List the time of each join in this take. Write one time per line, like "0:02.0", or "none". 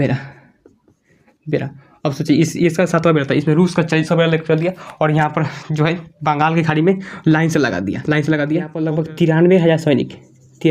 0:08.8